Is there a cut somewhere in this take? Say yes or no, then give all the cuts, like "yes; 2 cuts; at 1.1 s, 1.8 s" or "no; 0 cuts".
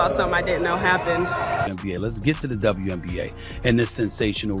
yes; 1 cut; at 1.6 s